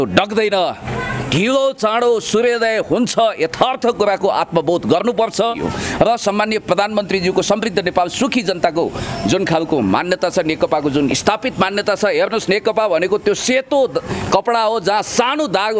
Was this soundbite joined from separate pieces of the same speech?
yes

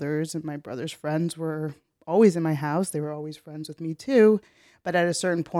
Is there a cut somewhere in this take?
no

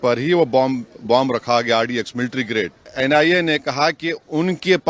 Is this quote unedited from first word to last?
no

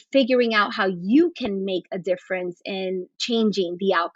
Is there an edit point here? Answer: no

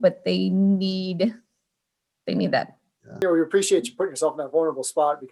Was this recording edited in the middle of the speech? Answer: yes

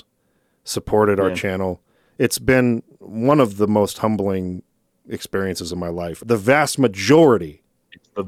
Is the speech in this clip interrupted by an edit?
yes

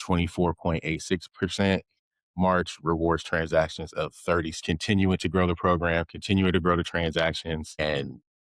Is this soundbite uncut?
no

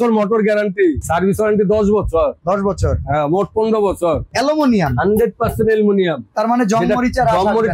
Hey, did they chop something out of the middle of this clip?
yes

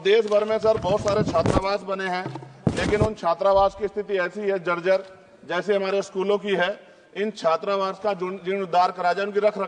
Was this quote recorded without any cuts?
yes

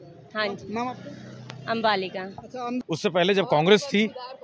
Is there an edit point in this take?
yes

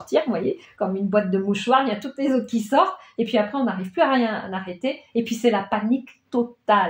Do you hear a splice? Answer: no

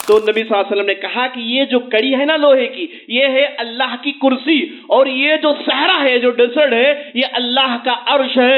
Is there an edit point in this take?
no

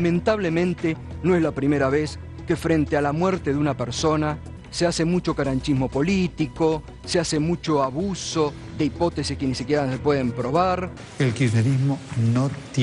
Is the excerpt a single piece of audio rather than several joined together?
yes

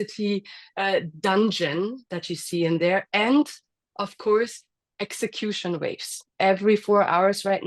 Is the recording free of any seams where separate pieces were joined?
yes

